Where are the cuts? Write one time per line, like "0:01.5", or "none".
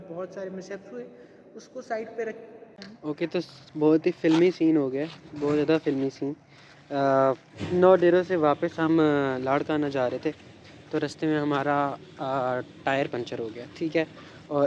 0:02.8